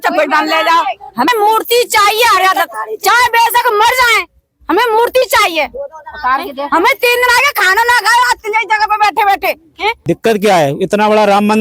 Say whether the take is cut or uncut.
cut